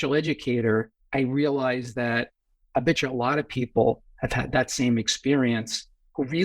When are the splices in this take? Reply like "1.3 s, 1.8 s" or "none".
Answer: 1.0 s